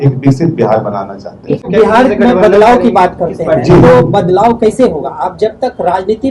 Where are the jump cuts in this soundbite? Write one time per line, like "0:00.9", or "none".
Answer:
0:01.6